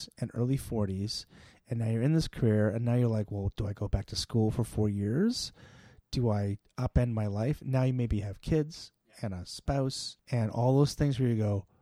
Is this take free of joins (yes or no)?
yes